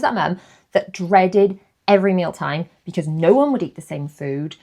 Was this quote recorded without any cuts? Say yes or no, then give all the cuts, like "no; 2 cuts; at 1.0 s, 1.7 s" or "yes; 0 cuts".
yes; 0 cuts